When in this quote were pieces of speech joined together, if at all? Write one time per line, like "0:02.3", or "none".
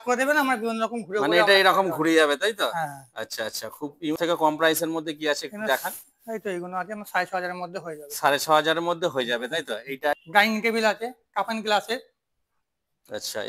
0:04.2
0:10.2

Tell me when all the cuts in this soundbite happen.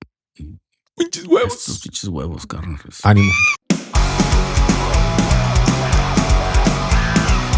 0:03.5

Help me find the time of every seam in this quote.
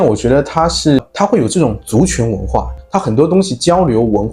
0:01.0
0:02.7

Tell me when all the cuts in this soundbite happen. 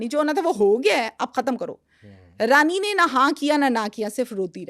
none

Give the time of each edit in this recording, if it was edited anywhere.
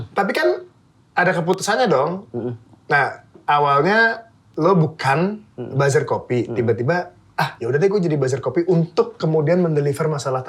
none

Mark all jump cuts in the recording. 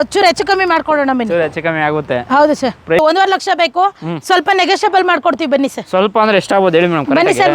0:03.0

